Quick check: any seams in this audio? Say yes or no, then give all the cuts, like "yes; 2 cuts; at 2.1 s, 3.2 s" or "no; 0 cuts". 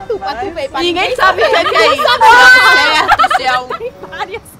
yes; 1 cut; at 3.7 s